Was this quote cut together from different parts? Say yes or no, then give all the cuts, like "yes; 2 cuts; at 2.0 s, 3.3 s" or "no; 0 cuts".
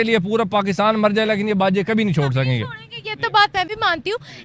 no; 0 cuts